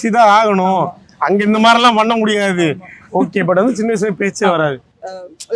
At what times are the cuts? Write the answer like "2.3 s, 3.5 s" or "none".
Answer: none